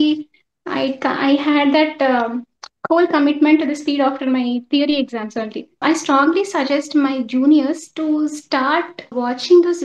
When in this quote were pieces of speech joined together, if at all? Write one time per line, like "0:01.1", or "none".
0:05.8
0:09.1